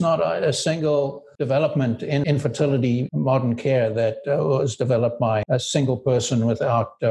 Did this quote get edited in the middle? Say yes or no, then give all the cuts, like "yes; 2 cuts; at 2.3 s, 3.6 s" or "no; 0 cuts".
no; 0 cuts